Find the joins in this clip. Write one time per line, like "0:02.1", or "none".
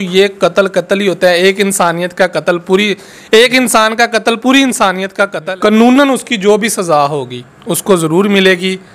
0:05.4